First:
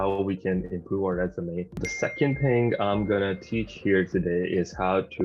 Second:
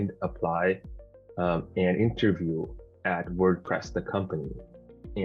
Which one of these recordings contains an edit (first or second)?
first